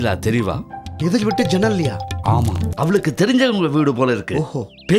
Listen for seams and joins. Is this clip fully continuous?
no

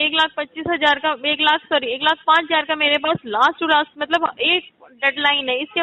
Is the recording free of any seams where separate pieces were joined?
yes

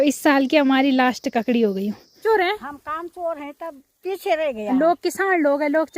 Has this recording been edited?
yes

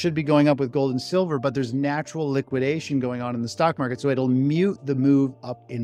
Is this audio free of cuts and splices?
yes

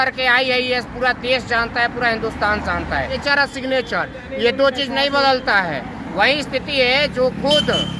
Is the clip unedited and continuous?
no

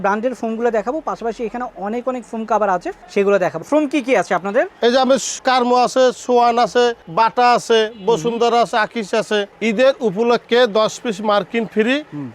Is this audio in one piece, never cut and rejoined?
no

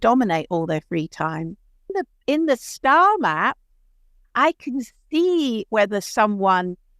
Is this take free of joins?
no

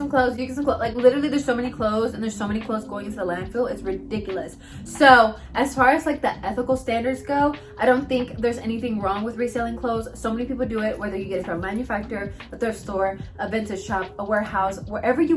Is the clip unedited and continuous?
yes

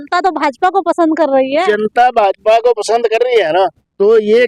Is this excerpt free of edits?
yes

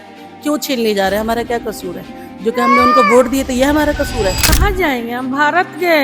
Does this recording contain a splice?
yes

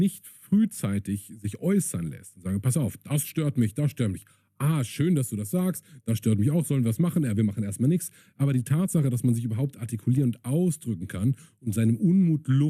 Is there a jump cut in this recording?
no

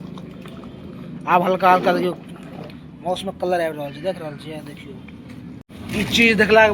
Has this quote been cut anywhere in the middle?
yes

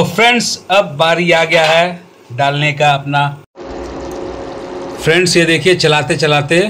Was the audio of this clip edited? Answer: yes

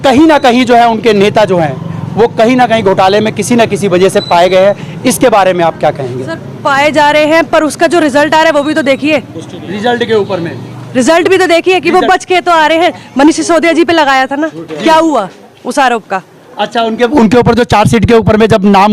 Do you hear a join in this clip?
no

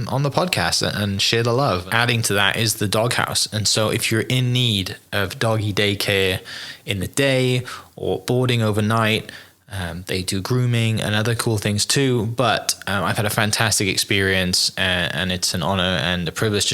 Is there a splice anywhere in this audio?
yes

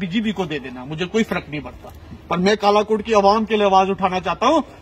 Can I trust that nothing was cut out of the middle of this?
yes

